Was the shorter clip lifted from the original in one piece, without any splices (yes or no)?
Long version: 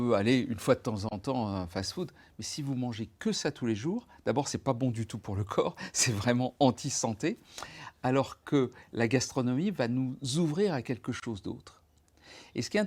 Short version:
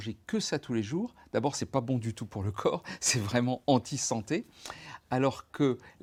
yes